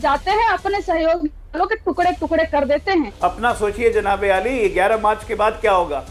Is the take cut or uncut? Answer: cut